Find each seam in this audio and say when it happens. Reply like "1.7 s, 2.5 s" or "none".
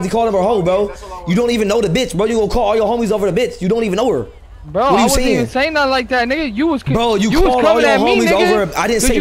none